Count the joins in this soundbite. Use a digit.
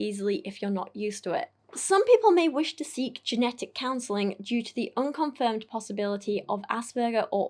1